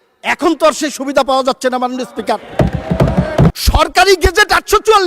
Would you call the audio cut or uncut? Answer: cut